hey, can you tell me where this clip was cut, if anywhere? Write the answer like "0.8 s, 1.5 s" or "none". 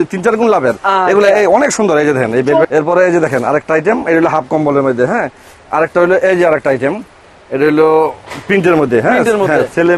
2.7 s

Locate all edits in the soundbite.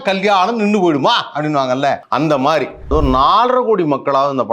2.0 s, 2.9 s

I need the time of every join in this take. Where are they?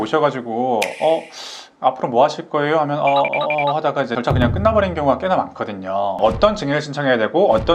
6.2 s

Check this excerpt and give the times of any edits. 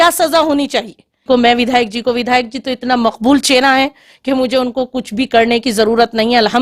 1.2 s

